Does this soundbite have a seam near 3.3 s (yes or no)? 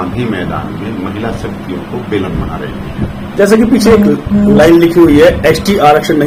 no